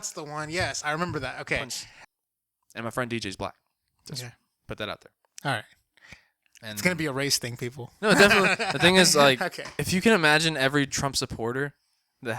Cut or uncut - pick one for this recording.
cut